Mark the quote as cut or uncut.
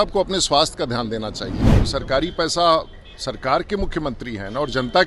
cut